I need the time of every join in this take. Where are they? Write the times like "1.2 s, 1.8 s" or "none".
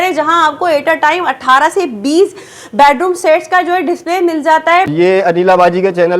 4.9 s